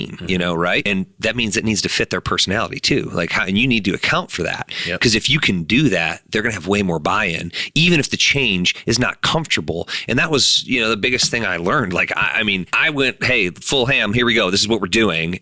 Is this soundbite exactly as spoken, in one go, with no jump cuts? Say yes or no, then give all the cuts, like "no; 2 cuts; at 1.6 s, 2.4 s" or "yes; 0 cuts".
no; 2 cuts; at 0.8 s, 12.7 s